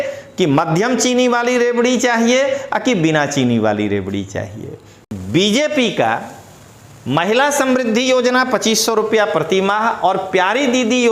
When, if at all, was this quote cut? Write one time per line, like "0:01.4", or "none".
0:04.9